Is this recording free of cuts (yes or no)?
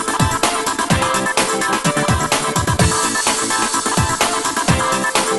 yes